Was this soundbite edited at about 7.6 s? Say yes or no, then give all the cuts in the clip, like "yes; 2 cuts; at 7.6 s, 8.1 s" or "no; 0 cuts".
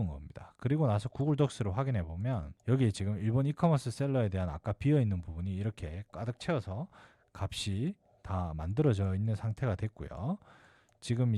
no; 1 cut; at 2.5 s